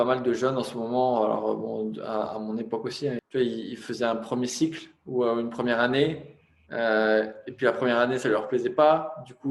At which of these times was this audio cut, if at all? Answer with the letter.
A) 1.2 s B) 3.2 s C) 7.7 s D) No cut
B